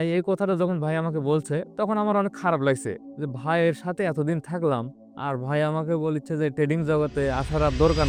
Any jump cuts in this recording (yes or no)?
no